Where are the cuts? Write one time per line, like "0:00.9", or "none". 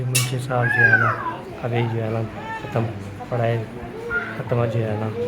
none